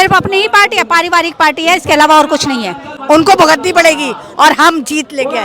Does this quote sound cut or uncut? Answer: cut